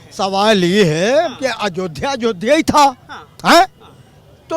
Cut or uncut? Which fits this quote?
uncut